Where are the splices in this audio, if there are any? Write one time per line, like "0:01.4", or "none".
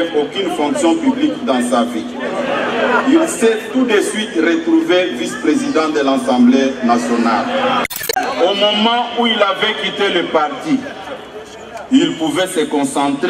0:08.2